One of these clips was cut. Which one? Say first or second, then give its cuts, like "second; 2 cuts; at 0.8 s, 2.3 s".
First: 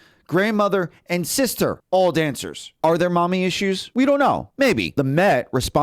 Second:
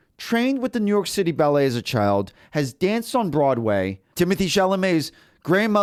first; 4 cuts; at 1.8 s, 2.6 s, 3.8 s, 4.6 s